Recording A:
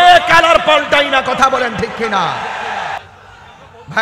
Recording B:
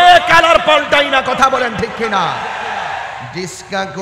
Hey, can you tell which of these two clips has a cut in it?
A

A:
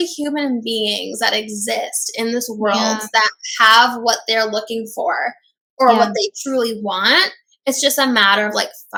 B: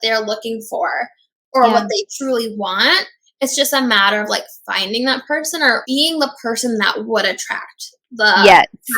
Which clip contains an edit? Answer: B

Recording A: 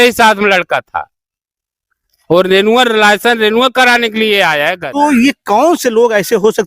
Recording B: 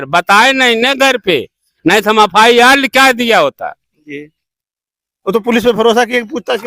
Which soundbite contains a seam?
A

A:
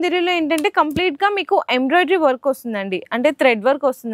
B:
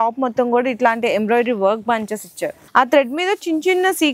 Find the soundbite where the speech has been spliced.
B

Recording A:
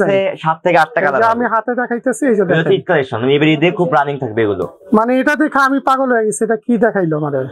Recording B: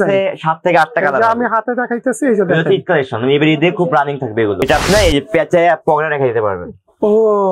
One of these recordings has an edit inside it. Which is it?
B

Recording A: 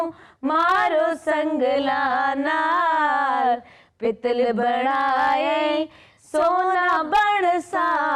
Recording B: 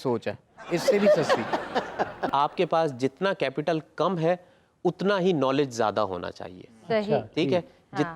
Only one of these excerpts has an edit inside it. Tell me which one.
B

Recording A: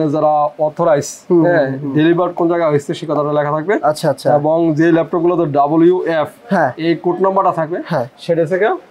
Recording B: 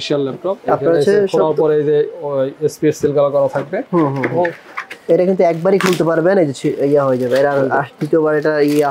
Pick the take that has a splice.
B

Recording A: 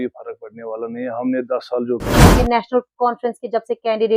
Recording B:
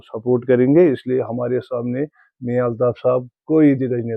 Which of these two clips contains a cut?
A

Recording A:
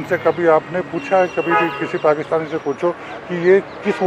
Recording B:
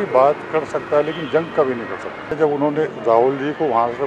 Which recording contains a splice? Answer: B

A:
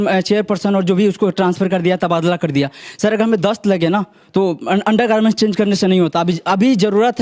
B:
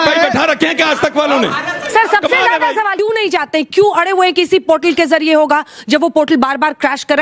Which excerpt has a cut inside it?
B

